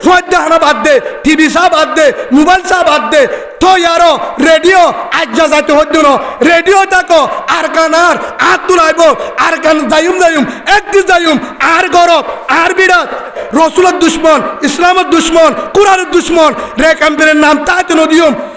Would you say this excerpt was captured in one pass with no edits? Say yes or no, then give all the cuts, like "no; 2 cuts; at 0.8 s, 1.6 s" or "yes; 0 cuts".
no; 1 cut; at 13.4 s